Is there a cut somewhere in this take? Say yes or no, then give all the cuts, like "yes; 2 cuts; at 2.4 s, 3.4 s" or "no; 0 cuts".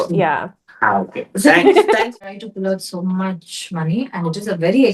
yes; 1 cut; at 2.1 s